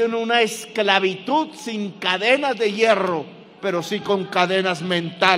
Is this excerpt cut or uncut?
uncut